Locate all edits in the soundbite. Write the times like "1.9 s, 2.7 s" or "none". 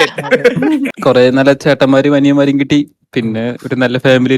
0.9 s

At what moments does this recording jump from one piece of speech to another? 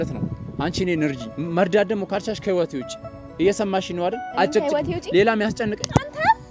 none

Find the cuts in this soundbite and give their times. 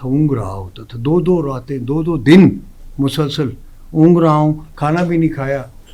none

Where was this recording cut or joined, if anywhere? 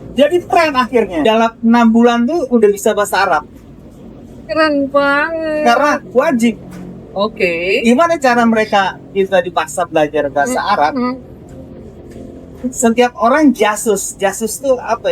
1.2 s

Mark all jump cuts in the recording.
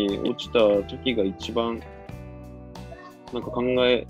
none

